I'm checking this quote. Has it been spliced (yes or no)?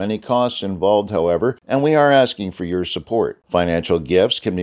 yes